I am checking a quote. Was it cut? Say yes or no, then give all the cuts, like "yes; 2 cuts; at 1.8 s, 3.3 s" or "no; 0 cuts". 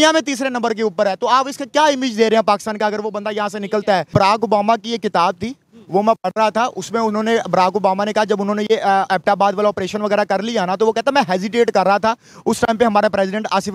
yes; 1 cut; at 4.1 s